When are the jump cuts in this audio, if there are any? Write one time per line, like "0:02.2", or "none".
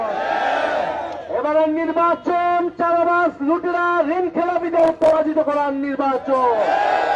none